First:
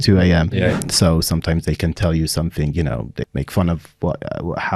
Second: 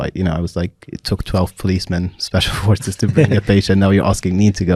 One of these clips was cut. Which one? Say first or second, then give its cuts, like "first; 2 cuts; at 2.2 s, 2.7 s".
first; 2 cuts; at 0.7 s, 3.2 s